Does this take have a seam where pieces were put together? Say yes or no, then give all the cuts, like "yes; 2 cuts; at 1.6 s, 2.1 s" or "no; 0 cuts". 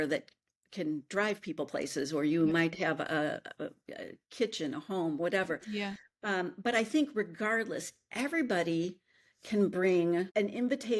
no; 0 cuts